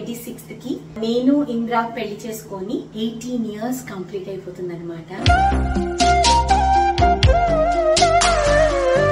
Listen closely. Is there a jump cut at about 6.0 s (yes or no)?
no